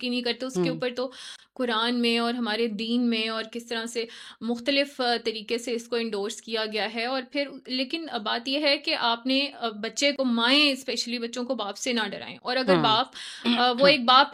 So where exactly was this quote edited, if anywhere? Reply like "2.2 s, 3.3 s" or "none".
none

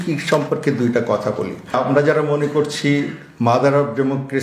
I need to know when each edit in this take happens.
none

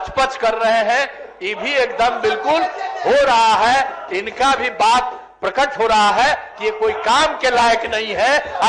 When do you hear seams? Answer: none

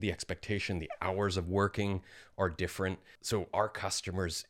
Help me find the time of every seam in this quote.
3.1 s

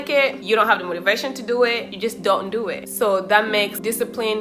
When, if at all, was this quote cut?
none

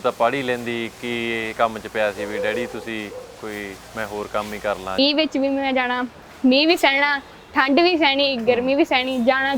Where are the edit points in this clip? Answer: 5.0 s

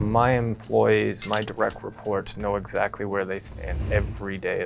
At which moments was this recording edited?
none

